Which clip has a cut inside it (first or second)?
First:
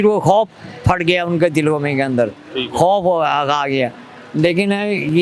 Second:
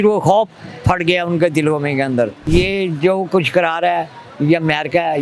second